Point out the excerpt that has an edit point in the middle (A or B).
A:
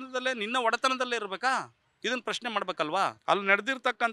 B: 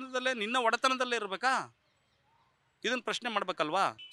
A